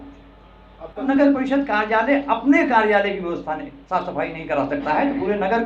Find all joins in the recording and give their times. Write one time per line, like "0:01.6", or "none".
0:01.1